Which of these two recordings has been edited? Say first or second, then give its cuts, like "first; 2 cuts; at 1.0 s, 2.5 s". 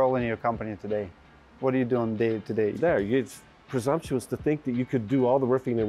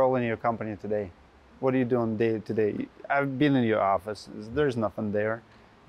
first; 1 cut; at 2.8 s